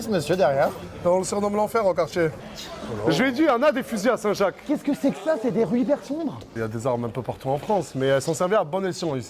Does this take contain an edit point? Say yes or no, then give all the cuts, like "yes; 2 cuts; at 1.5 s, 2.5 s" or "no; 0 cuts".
yes; 2 cuts; at 2.5 s, 6.4 s